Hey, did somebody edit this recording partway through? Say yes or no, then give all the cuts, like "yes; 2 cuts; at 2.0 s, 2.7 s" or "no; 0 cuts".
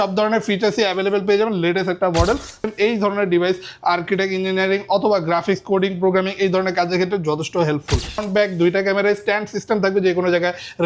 yes; 2 cuts; at 2.7 s, 8.2 s